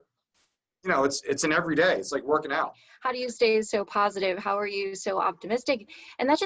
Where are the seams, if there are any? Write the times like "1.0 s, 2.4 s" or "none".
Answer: 2.9 s